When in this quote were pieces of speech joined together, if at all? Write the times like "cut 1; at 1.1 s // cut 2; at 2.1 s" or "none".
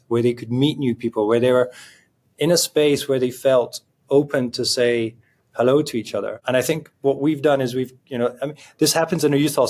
cut 1; at 6.4 s